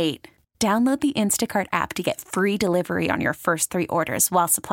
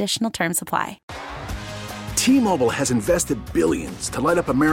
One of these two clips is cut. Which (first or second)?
second